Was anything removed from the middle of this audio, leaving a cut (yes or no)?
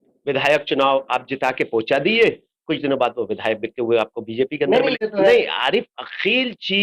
yes